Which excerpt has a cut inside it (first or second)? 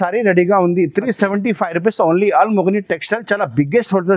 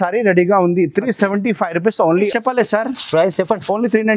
second